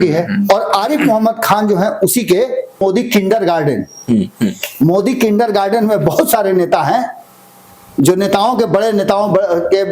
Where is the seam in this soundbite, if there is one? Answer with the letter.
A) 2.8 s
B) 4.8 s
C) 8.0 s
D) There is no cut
A